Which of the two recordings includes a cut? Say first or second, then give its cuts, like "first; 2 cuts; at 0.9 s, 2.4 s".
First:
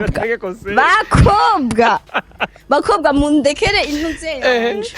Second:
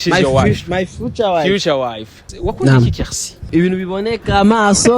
second; 2 cuts; at 2.3 s, 3.5 s